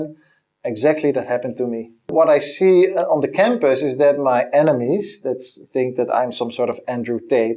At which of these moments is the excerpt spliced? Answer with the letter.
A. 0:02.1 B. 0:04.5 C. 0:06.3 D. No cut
A